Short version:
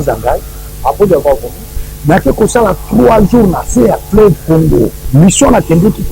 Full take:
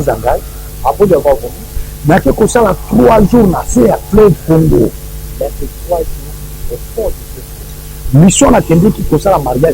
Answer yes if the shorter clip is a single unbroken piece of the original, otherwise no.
no